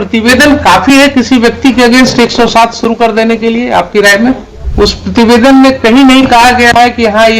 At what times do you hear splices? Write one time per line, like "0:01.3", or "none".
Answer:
0:04.6

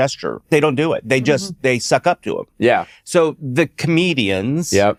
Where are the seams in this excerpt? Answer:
none

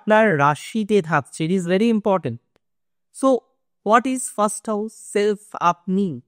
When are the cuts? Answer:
none

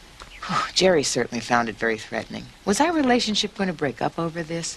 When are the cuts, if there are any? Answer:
0:02.9

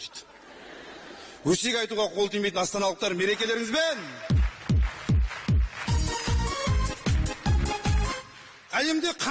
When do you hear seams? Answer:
0:07.0

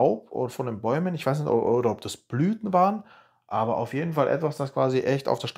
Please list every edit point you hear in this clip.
none

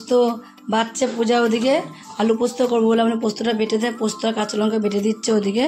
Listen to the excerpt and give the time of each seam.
none

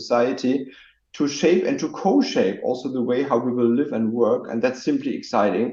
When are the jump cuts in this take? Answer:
none

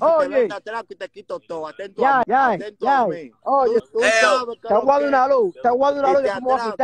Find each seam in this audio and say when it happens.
0:02.2
0:03.8

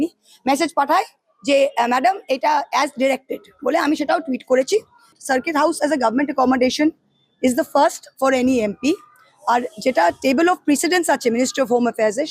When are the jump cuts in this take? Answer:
0:05.2

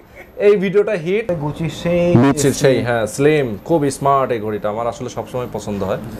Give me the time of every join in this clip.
0:01.3

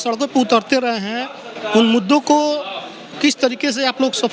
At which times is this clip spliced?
none

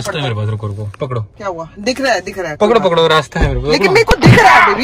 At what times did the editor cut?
none

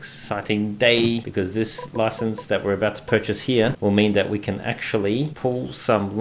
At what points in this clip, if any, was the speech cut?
0:01.3
0:03.8
0:05.3

